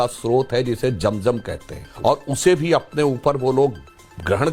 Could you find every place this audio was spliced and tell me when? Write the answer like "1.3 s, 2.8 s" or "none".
1.9 s